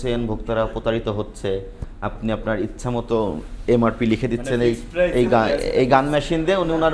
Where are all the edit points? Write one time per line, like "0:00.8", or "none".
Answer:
none